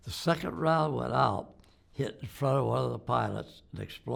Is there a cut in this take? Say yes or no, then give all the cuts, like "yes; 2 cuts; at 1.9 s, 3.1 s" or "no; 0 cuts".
no; 0 cuts